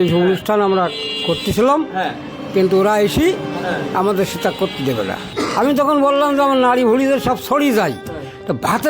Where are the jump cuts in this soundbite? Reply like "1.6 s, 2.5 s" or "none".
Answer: 5.2 s